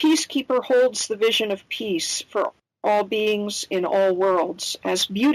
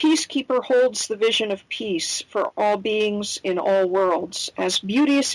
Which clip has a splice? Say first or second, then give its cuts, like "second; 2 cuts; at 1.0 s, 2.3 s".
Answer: second; 1 cut; at 2.5 s